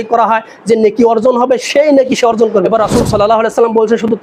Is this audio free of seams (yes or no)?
no